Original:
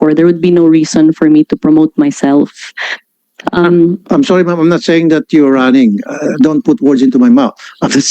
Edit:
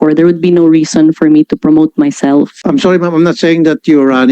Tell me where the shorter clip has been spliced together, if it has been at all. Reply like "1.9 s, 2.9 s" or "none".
2.6 s